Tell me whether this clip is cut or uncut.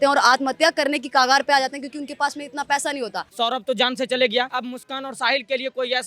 cut